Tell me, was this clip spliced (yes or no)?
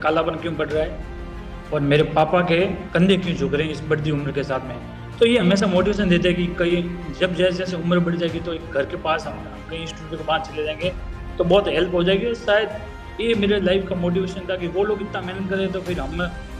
no